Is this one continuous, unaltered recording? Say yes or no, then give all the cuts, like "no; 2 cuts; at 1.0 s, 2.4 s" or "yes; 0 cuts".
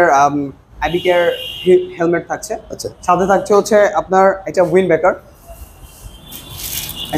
yes; 0 cuts